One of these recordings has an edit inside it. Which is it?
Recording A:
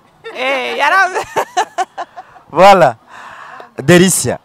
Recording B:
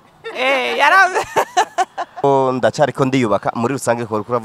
B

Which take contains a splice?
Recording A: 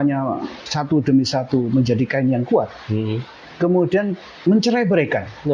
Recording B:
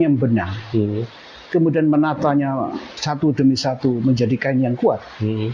A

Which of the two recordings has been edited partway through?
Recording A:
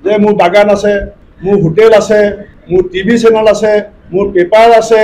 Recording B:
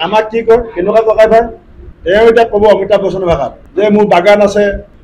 A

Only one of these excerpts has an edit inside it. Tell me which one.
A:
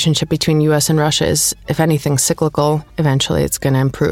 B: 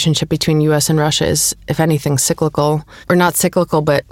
A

